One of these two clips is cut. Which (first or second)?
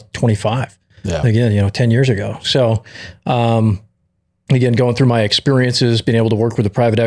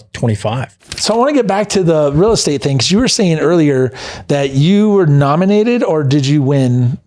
second